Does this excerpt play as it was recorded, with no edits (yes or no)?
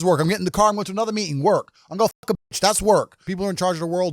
no